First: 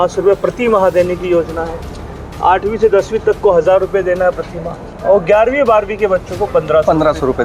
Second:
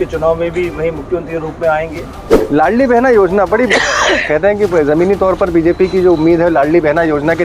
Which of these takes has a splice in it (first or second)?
second